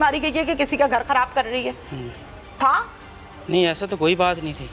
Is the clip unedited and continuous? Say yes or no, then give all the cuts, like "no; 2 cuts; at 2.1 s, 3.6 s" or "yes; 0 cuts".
yes; 0 cuts